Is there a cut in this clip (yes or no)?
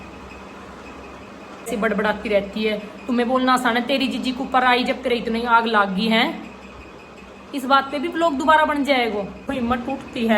yes